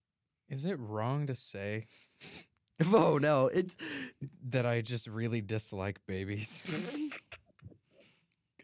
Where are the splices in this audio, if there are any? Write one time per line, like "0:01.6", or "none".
none